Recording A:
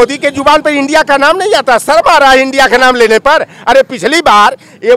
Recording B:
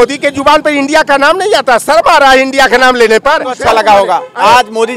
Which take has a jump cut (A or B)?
B